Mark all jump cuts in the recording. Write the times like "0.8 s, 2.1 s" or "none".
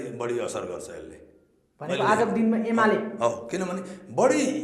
none